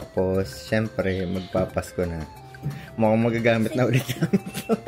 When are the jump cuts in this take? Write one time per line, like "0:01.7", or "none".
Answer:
none